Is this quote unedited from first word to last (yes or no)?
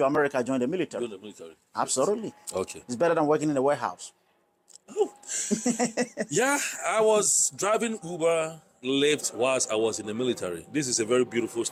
yes